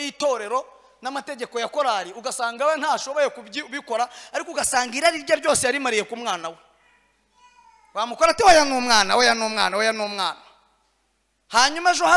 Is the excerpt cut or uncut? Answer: uncut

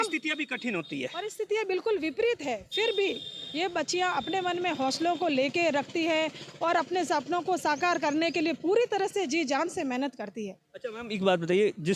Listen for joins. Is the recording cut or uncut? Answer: uncut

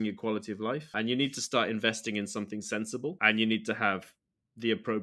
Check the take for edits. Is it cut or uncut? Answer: cut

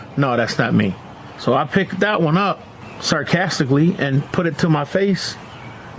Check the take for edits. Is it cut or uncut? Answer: uncut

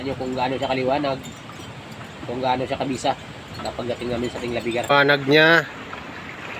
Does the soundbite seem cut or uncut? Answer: cut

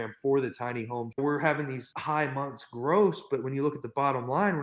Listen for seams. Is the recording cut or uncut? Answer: cut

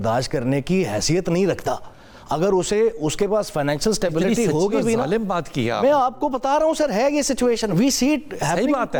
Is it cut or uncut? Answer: uncut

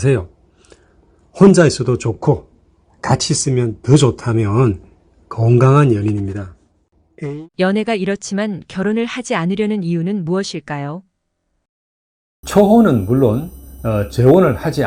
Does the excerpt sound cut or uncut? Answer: uncut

